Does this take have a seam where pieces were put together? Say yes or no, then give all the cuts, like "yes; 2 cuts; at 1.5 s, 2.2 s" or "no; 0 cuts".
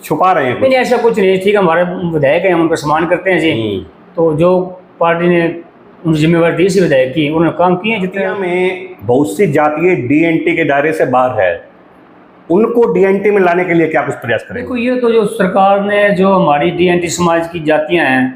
yes; 2 cuts; at 8.3 s, 14.7 s